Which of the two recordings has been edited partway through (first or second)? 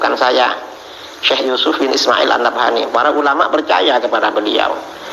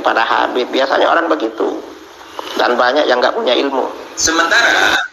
second